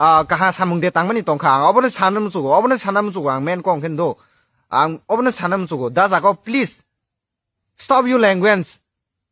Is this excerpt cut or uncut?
uncut